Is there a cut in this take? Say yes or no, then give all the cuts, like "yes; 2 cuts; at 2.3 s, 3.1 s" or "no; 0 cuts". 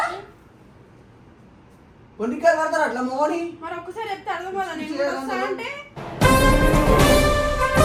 no; 0 cuts